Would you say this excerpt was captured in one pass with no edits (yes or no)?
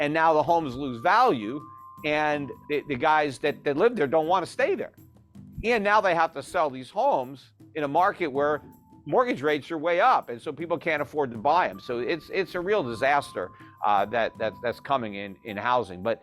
no